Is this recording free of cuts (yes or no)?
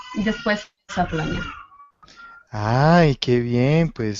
no